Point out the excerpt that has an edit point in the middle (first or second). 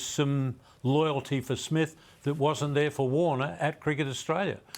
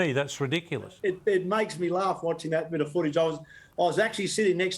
second